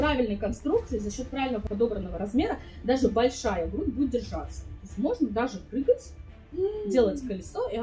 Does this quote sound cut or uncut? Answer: uncut